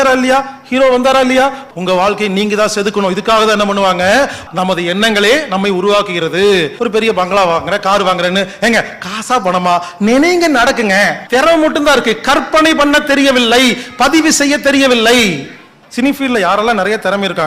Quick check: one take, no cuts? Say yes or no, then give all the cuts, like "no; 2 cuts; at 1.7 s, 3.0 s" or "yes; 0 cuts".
no; 5 cuts; at 1.6 s, 4.4 s, 6.7 s, 11.2 s, 15.8 s